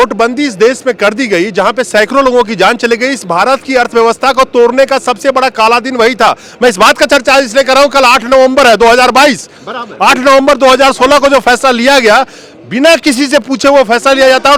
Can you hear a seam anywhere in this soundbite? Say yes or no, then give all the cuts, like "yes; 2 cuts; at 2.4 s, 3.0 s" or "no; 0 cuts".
no; 0 cuts